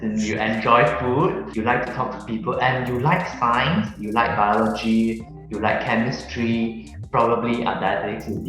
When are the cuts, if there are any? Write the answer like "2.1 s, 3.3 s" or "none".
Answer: 1.5 s, 6.9 s

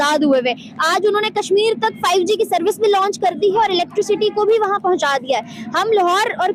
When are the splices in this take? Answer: none

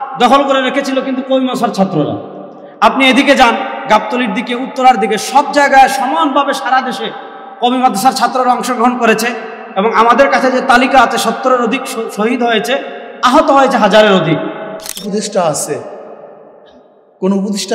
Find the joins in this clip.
15.1 s

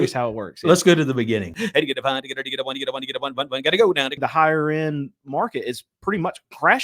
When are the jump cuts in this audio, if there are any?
1.5 s, 4.2 s

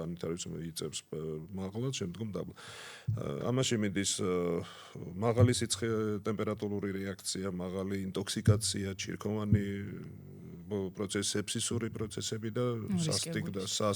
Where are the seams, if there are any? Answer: none

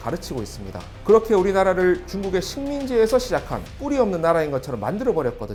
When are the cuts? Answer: none

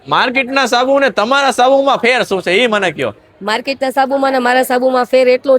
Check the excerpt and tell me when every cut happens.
none

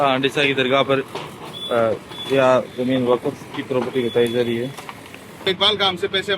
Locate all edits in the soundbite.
5.3 s

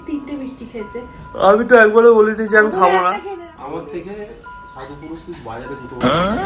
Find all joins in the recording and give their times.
3.3 s

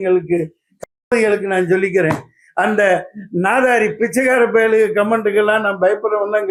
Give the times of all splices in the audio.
none

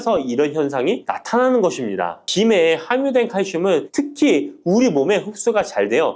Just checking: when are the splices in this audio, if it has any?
2.2 s

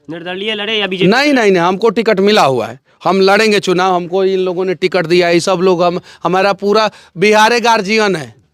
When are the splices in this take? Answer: none

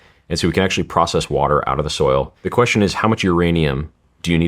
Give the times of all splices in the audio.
2.4 s

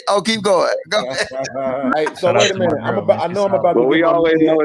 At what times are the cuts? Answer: 1.9 s

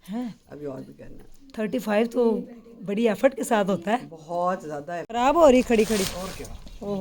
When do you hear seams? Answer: 5.1 s

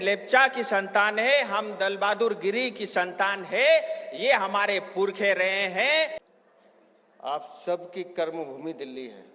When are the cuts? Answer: 6.3 s

